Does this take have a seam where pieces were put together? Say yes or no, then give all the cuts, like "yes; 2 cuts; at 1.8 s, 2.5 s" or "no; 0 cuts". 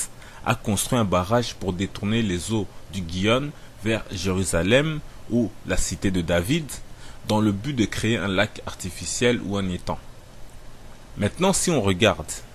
yes; 1 cut; at 8.1 s